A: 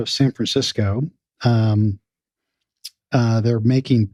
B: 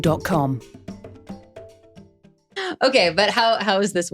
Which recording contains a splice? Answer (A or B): B